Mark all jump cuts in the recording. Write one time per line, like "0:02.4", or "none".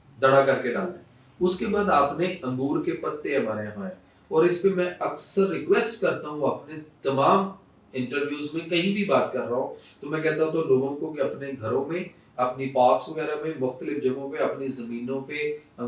none